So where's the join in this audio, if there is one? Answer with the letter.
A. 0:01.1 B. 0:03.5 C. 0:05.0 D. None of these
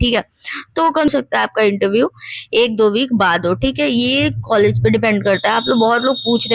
A